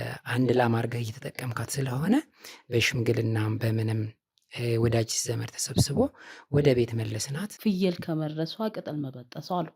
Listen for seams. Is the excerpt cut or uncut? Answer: cut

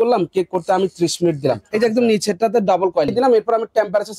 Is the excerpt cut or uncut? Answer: cut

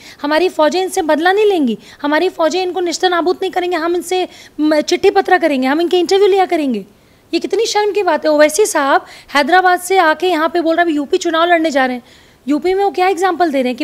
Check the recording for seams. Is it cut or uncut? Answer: uncut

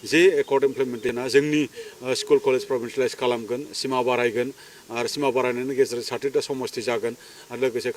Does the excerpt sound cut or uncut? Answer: cut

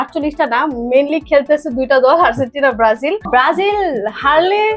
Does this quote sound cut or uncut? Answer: cut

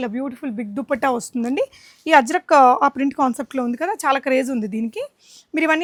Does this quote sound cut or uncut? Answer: uncut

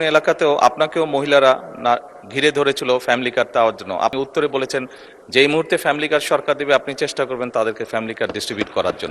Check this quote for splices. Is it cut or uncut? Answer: cut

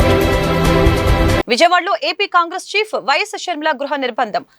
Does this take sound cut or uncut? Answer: cut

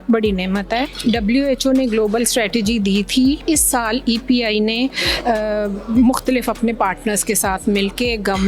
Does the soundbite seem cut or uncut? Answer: cut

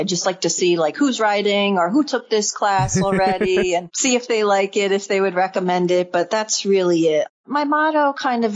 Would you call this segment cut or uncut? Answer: cut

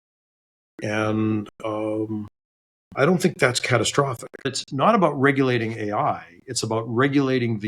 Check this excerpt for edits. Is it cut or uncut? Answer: cut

